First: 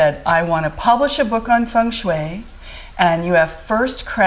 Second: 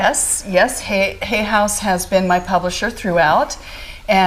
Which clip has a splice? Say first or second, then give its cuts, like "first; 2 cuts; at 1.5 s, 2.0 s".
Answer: second; 1 cut; at 2.9 s